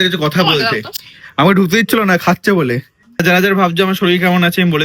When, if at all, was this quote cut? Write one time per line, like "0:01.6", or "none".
0:03.2